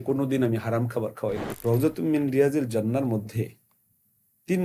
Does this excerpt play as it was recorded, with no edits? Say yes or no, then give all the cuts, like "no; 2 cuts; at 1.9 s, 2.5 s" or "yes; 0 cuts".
no; 1 cut; at 1.5 s